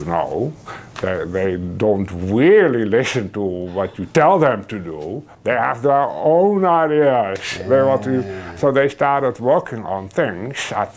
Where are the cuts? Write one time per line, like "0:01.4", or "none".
none